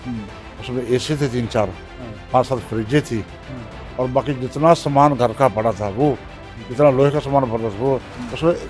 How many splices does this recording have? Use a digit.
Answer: 0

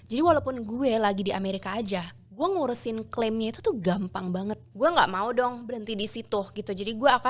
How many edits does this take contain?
1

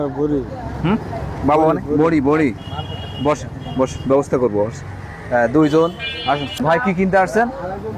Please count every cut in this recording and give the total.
1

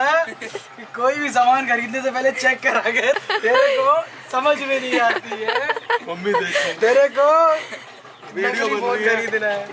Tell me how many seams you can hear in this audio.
1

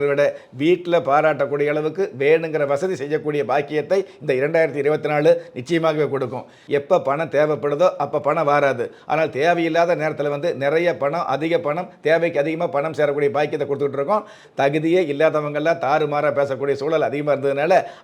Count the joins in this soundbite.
2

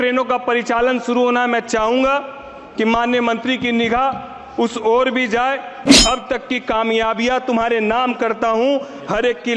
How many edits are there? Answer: 1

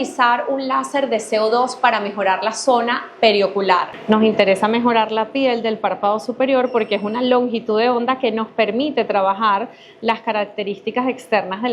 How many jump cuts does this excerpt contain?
1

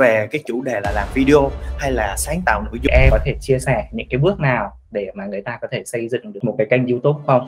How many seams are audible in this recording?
1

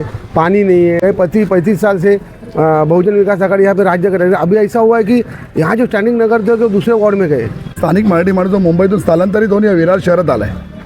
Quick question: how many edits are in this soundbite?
2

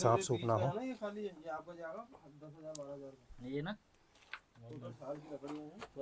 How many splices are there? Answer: 0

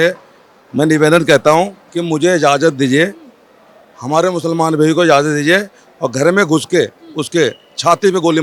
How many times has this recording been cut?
0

